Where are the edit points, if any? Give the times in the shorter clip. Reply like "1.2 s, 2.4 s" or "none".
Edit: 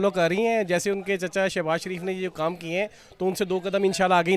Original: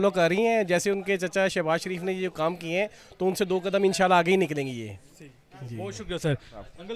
none